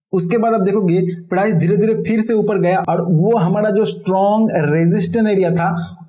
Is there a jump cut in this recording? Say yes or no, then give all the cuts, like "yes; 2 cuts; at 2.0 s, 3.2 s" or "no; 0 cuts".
no; 0 cuts